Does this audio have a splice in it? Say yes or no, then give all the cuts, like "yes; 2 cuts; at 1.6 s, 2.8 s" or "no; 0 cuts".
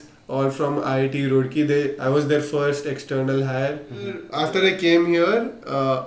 yes; 1 cut; at 4.3 s